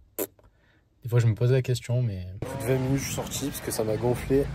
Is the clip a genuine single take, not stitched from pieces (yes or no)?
no